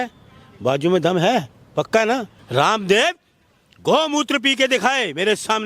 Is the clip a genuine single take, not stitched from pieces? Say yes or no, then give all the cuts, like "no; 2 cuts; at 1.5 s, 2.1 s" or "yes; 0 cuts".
no; 1 cut; at 2.4 s